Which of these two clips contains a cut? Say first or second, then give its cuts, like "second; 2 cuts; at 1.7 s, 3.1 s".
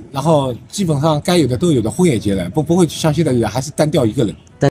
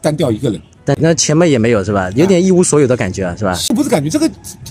second; 1 cut; at 3.7 s